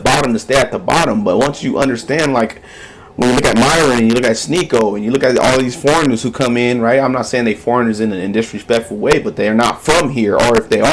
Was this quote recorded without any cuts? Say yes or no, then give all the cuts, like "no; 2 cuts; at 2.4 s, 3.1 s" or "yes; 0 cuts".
yes; 0 cuts